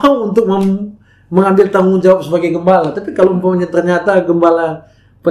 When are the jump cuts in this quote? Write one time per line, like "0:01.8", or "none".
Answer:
none